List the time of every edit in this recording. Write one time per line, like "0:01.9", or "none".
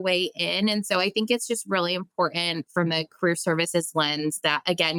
none